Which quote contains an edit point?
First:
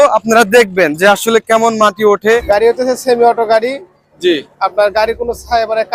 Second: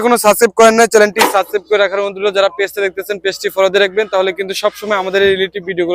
first; 1 cut; at 2.4 s

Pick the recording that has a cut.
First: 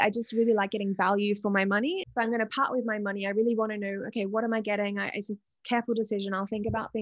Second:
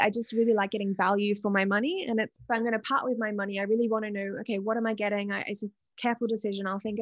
first; 1 cut; at 2.0 s

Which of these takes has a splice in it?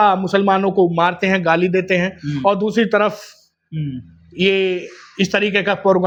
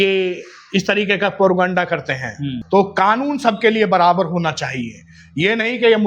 second; 1 cut; at 2.5 s

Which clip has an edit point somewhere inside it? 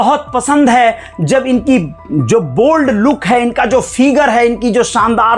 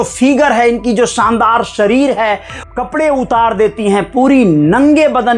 second; 1 cut; at 2.5 s

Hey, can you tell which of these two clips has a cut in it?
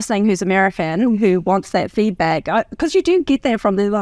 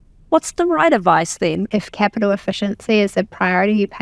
second; 1 cut; at 1.6 s

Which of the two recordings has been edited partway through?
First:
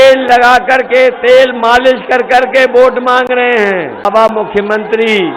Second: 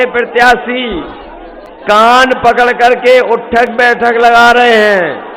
first; 1 cut; at 4.1 s

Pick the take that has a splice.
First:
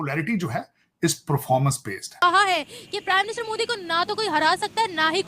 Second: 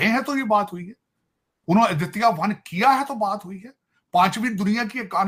first; 1 cut; at 2.1 s

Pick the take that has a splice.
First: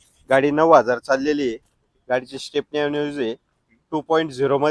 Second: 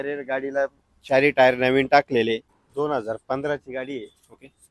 second; 1 cut; at 2.6 s

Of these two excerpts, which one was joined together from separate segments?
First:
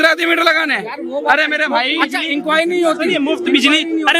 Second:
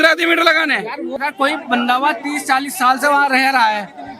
second; 1 cut; at 1.2 s

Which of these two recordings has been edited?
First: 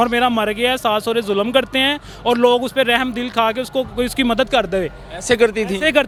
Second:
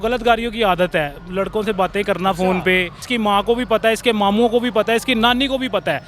second; 1 cut; at 3.0 s

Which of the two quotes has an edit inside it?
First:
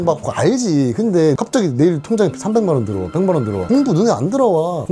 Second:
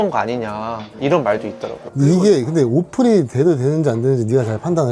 first; 1 cut; at 1.3 s

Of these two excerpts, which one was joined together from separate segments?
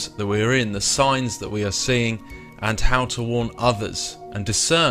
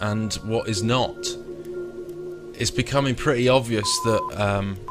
second; 1 cut; at 1.7 s

